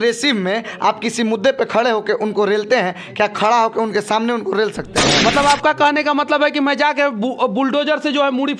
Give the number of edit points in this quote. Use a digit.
1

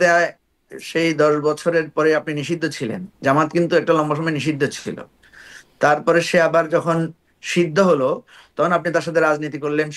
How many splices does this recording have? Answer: 0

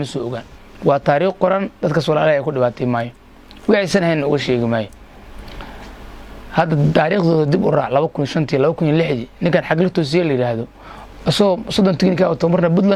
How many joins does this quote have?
0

